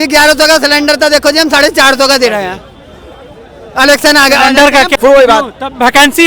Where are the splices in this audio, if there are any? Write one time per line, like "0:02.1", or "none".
0:04.9